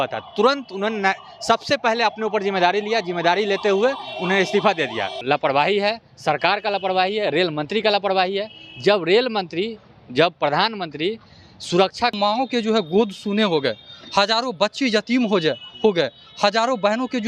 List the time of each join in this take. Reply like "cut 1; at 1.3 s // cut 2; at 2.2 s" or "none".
cut 1; at 5.2 s // cut 2; at 12.1 s